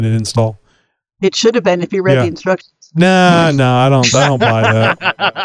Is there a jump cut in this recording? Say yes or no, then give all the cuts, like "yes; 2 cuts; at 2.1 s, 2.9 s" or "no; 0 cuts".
no; 0 cuts